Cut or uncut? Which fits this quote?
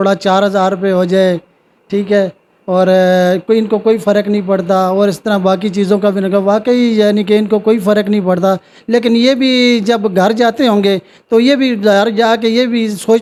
uncut